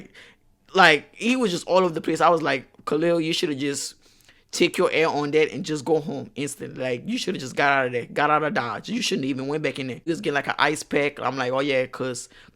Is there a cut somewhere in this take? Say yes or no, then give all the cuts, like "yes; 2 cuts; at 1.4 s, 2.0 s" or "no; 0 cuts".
yes; 1 cut; at 10.1 s